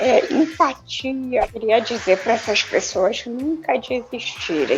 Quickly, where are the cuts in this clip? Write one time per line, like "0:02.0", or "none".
0:01.4